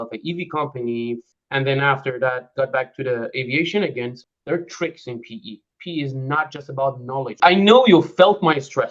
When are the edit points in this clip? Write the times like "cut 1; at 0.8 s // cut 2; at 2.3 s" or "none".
cut 1; at 1.3 s // cut 2; at 4.2 s // cut 3; at 7.4 s